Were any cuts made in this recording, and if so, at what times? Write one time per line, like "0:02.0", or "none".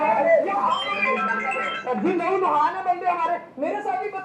none